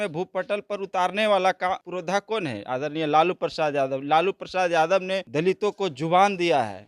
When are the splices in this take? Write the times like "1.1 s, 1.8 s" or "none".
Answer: 1.8 s, 5.2 s

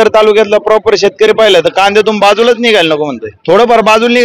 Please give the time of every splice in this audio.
3.3 s

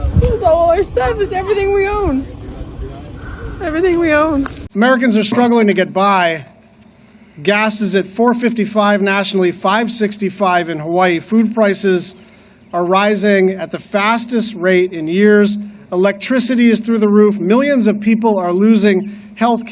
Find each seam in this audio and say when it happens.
4.7 s

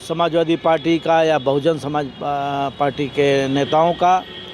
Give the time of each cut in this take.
none

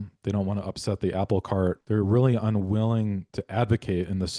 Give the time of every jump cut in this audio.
1.8 s, 3.3 s

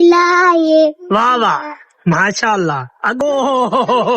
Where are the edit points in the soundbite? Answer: 3.2 s

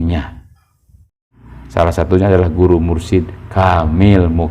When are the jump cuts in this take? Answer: 1.1 s

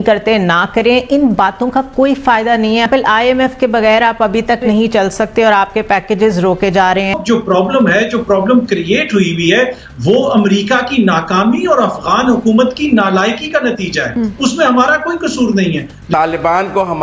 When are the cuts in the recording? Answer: 2.9 s, 7.2 s, 16.1 s

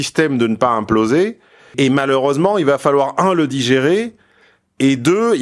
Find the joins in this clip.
1.7 s

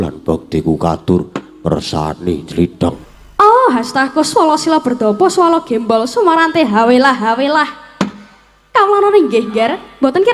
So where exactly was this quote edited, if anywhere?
3.0 s

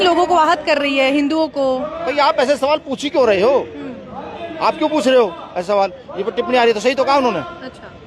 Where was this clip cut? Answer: 2.1 s

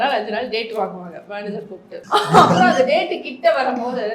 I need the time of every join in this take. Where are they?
2.0 s

